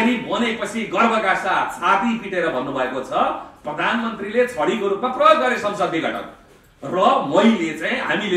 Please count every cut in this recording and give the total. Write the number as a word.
zero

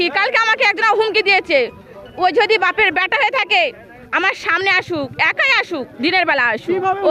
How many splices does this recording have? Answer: zero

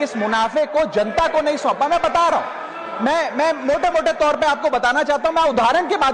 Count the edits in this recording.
zero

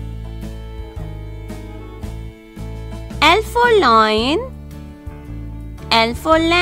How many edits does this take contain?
one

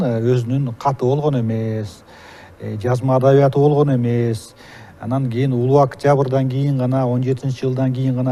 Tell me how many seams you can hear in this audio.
zero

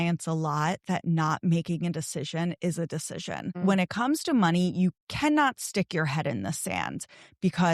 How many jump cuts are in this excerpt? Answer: two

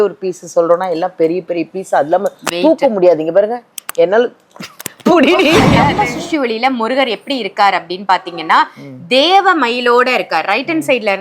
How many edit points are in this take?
one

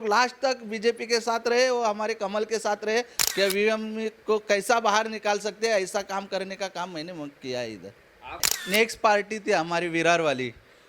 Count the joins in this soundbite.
two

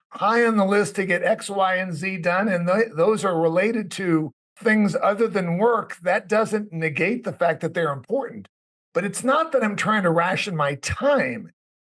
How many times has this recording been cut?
one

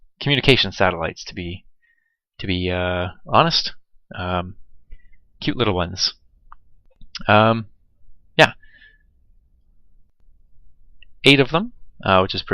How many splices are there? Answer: one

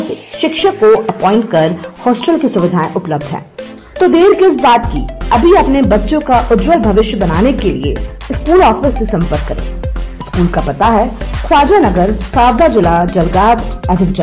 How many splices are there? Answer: zero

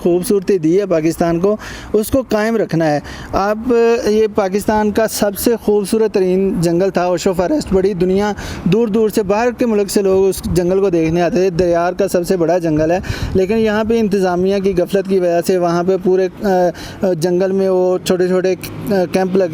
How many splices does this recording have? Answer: zero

